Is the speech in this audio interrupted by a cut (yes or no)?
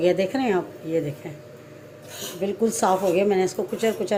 no